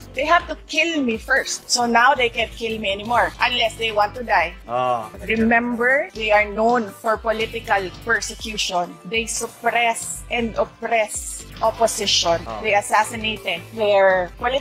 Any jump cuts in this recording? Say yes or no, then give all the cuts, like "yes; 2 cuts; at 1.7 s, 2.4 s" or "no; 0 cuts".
no; 0 cuts